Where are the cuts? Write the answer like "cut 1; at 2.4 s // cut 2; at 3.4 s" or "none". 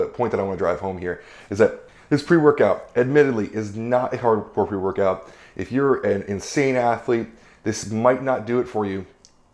none